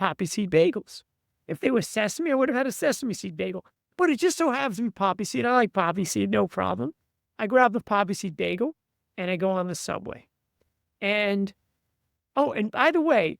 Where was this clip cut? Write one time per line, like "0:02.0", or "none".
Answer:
none

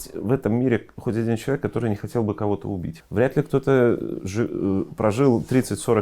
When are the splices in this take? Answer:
0:03.0

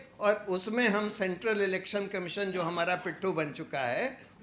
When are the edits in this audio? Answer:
none

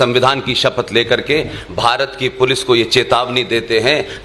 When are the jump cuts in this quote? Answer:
none

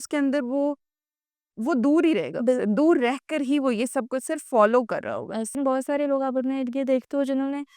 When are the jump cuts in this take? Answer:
0:05.5

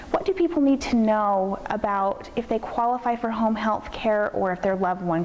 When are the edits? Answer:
none

